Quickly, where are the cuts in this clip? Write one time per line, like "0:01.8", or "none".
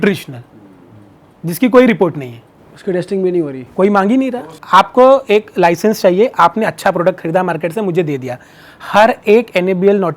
0:04.4